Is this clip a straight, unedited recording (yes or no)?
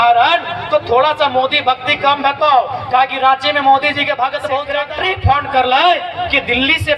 no